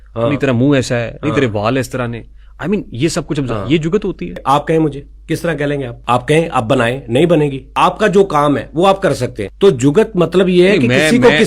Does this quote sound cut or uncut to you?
cut